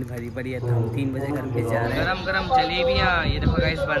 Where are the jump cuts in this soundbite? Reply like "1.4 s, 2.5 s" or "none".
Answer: 2.0 s